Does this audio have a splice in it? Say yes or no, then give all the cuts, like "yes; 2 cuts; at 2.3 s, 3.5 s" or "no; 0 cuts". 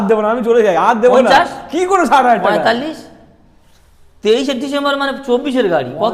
no; 0 cuts